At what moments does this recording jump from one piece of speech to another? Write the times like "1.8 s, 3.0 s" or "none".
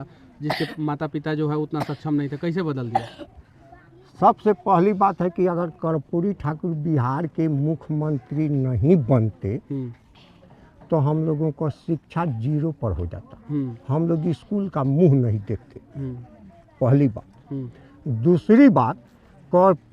none

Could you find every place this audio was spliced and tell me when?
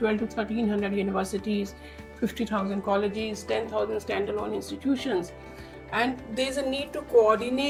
none

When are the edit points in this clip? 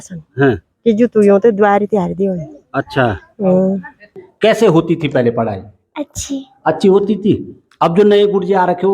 4.2 s

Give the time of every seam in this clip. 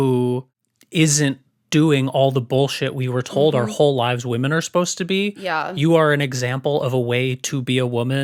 none

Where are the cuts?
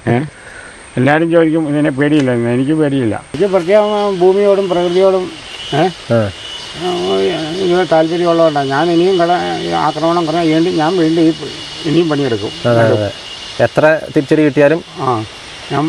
3.3 s

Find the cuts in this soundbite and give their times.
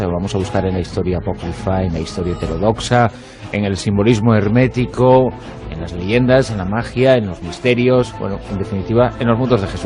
1.2 s

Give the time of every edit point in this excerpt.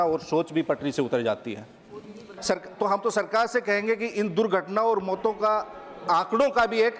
2.3 s

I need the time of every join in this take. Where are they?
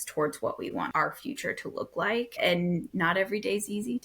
0.9 s, 2.4 s

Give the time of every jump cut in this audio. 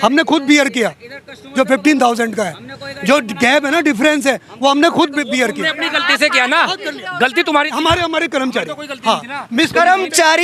none

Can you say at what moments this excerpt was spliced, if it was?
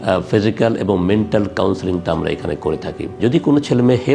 3.2 s

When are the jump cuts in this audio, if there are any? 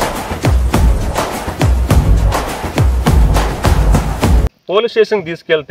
4.5 s

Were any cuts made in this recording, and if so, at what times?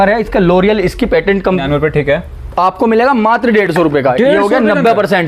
1.6 s

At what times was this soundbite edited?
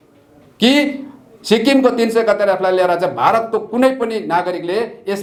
none

